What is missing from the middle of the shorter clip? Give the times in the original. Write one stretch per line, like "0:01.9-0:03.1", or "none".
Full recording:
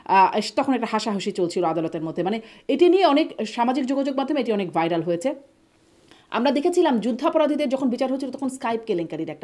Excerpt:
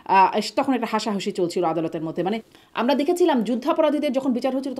0:02.5-0:06.1